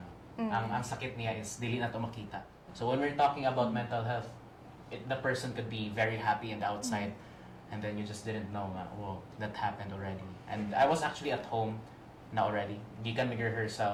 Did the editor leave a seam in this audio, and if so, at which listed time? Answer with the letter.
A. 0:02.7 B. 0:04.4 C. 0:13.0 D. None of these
D